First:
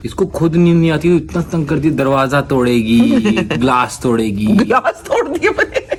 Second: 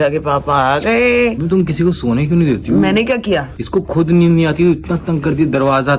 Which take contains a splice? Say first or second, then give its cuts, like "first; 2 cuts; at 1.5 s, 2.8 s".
second; 1 cut; at 1.4 s